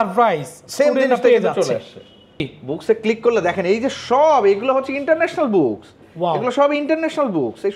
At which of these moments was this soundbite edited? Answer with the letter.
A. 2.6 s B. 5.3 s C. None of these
A